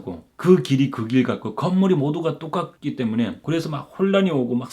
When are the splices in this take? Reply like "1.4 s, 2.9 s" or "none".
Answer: 3.4 s